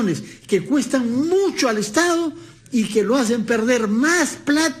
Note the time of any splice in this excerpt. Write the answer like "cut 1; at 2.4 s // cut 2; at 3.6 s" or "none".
none